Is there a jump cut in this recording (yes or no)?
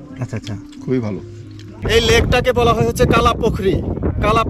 yes